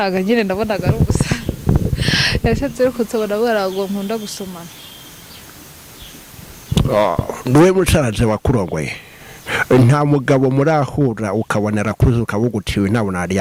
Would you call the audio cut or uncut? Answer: uncut